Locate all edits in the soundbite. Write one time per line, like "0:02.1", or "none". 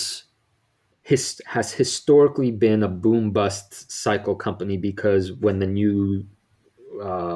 none

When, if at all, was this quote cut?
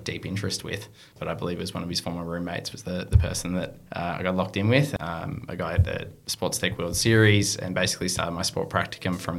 0:01.1
0:04.9

